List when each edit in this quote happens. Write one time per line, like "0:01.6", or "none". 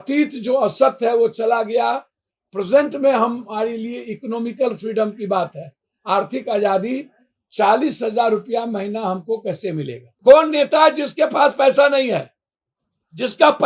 0:10.0